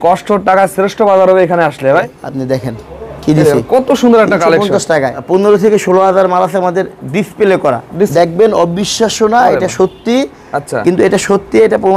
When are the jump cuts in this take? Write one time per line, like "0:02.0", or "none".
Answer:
0:02.0
0:05.2
0:08.1